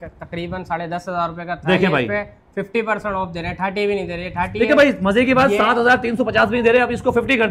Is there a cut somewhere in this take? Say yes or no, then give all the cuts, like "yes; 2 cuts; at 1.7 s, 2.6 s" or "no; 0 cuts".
no; 0 cuts